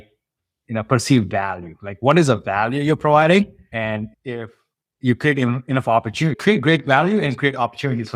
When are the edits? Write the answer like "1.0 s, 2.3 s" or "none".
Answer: 3.7 s